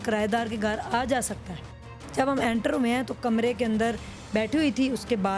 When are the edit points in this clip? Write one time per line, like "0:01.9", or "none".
0:01.9

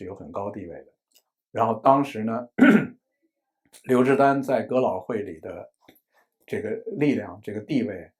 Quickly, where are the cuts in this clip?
none

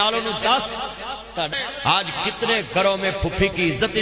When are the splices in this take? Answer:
0:01.7

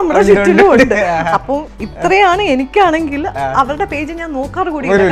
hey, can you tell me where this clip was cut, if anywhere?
none

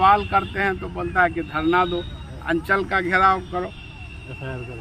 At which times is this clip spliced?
none

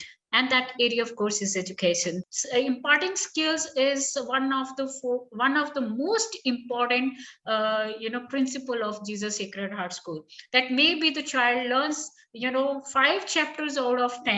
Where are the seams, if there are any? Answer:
0:02.3

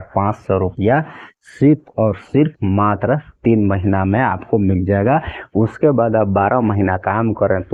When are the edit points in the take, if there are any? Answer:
none

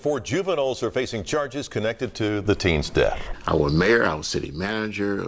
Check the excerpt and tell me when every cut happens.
0:03.2

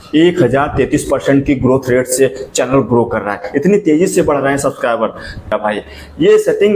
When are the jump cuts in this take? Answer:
0:05.5

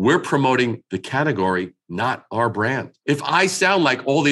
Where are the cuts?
0:02.9

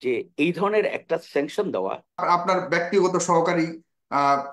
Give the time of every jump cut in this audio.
0:02.2

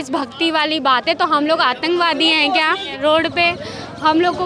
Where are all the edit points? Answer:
0:03.0

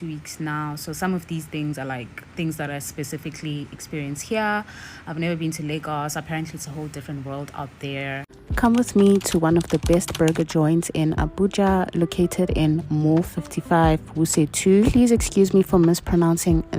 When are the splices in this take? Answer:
0:08.4

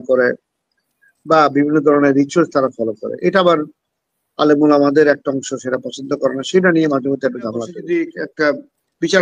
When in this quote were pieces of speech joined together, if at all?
0:07.8

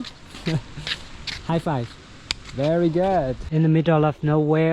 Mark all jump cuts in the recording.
0:03.4

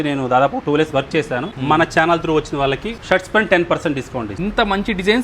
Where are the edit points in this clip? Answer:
0:01.5
0:02.9
0:04.4

